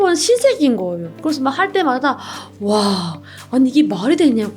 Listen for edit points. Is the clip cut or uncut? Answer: cut